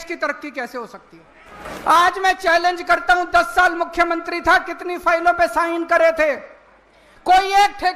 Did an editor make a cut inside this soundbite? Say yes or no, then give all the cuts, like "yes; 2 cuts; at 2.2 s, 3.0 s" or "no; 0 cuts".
yes; 1 cut; at 1.6 s